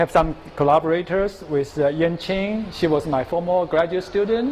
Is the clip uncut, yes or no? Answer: no